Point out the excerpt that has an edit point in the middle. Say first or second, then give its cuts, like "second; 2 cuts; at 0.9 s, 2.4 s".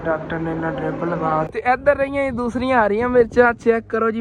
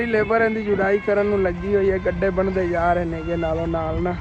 first; 1 cut; at 1.5 s